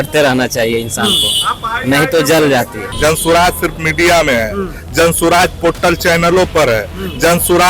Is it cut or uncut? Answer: cut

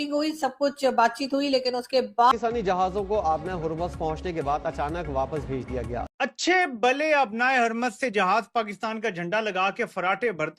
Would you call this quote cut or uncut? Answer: cut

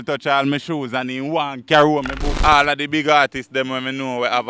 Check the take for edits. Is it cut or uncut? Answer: cut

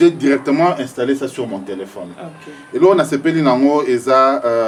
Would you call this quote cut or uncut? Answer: uncut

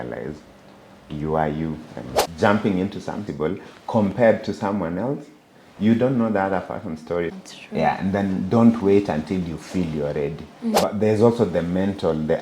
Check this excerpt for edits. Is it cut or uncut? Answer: cut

